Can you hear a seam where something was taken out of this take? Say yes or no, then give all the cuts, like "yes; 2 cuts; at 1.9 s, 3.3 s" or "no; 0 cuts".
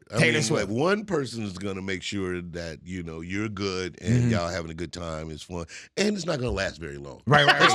no; 0 cuts